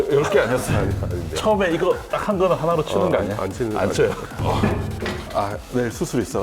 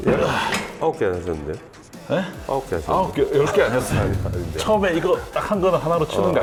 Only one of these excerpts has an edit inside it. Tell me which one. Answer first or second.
first